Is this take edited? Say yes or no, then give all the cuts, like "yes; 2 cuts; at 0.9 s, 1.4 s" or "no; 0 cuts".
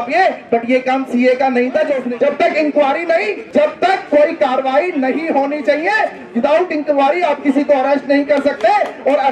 yes; 2 cuts; at 2.0 s, 3.4 s